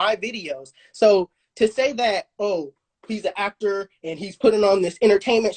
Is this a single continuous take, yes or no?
yes